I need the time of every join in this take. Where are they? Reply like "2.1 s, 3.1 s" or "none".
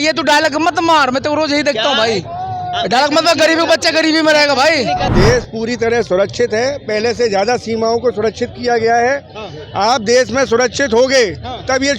5.1 s